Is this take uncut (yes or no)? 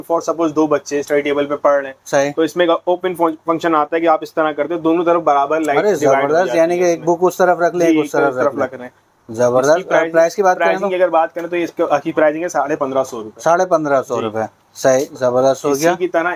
yes